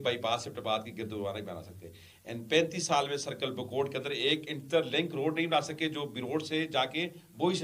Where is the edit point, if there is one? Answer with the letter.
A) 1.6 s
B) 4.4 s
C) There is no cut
C